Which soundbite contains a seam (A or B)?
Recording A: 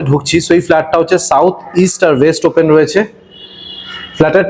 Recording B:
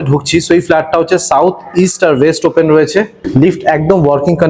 B